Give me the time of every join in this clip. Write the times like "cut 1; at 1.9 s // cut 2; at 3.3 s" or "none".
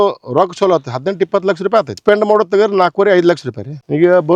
cut 1; at 2.0 s